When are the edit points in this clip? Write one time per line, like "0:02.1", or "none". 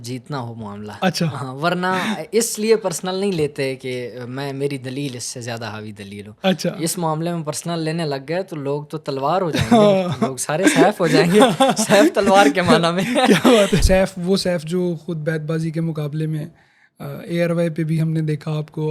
0:13.8